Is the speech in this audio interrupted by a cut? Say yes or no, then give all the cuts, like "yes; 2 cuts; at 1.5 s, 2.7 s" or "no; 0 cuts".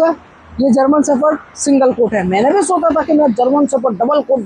no; 0 cuts